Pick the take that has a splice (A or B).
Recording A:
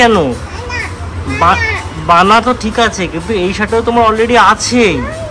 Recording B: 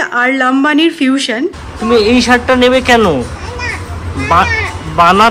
B